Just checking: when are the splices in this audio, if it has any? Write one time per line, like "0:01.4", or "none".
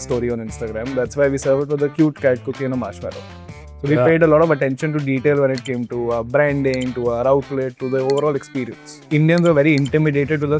0:08.9